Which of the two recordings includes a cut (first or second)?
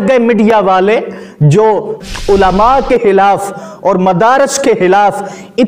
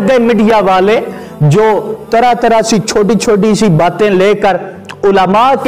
first